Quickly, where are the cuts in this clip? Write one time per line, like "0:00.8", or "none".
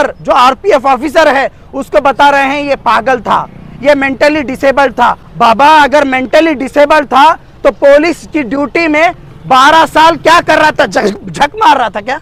none